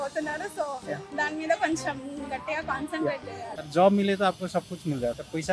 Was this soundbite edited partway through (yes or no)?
yes